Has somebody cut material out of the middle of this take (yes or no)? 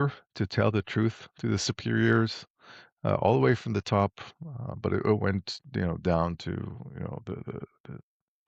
no